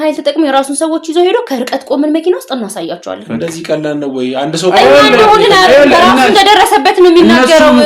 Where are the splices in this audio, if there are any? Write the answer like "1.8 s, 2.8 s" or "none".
none